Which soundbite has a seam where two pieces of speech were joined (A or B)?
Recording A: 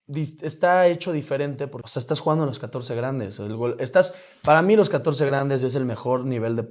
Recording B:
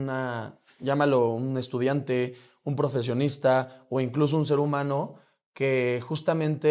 A